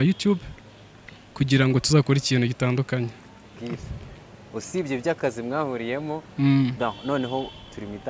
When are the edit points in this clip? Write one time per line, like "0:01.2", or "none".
0:03.6